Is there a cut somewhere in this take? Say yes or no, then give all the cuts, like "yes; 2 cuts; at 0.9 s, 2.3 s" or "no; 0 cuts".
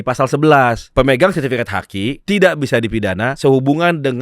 yes; 3 cuts; at 0.8 s, 2.2 s, 3.3 s